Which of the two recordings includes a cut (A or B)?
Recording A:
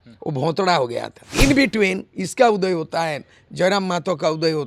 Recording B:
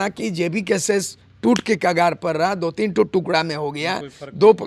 A